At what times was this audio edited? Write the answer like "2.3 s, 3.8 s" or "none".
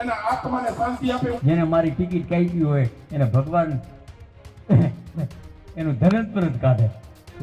1.4 s